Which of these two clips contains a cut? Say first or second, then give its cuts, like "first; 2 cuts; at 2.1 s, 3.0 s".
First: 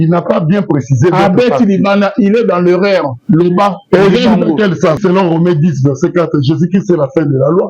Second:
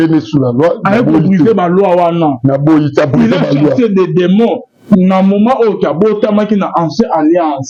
first; 1 cut; at 5.0 s